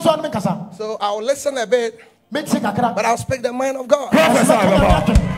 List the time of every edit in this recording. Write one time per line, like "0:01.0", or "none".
none